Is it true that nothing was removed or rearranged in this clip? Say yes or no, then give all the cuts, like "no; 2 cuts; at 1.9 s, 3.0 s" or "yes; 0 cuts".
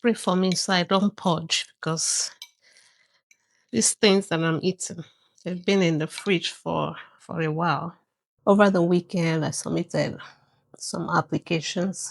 no; 1 cut; at 8.2 s